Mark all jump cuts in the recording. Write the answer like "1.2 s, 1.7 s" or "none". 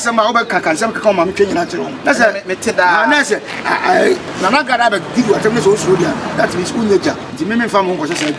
1.9 s, 4.3 s, 7.3 s